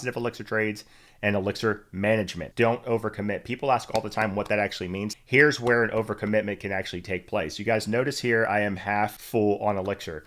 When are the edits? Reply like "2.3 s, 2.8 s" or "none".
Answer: 2.5 s, 5.1 s, 9.2 s